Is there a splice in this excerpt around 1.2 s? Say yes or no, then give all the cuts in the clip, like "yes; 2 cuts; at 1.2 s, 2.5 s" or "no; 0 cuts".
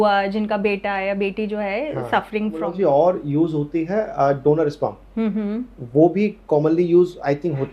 no; 1 cut; at 2.7 s